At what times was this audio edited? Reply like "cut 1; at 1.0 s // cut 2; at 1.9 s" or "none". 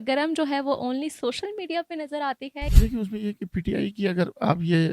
cut 1; at 2.6 s

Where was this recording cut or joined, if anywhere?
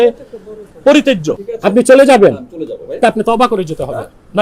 cut 1; at 1.5 s

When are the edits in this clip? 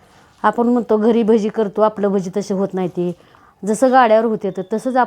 cut 1; at 3.3 s

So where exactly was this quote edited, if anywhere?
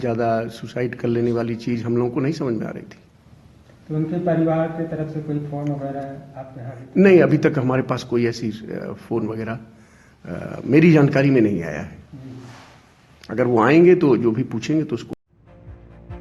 none

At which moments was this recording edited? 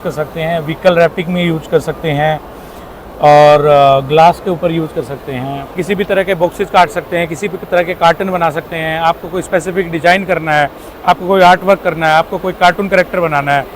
cut 1; at 5.7 s

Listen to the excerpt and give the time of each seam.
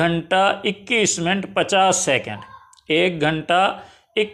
none

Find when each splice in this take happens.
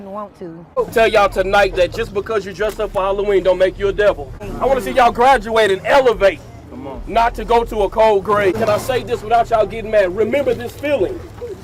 cut 1; at 0.8 s // cut 2; at 4.5 s // cut 3; at 8.6 s

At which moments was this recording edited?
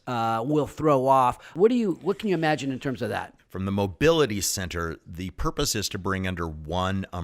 cut 1; at 1.5 s // cut 2; at 3.4 s

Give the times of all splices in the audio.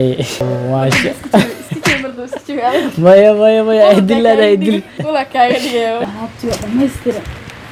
none

